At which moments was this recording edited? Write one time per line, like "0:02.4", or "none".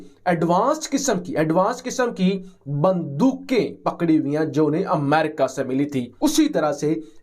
0:06.1